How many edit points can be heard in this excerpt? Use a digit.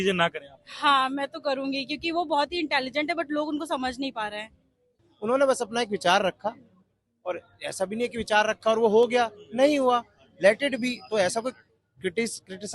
1